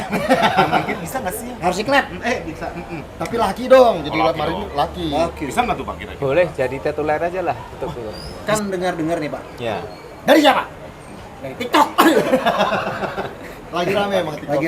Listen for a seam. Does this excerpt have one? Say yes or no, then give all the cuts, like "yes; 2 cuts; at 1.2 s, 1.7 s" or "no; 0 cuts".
yes; 1 cut; at 8.2 s